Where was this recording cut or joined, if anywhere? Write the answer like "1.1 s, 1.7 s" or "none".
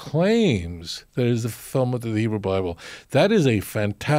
none